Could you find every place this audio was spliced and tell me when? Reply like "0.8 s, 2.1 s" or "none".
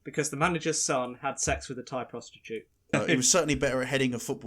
2.9 s